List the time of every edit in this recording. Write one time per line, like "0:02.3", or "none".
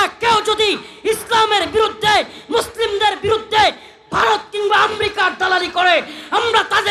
none